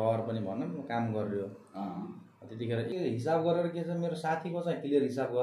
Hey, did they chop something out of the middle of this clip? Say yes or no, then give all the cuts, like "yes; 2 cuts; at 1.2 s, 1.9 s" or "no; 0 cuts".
yes; 1 cut; at 2.9 s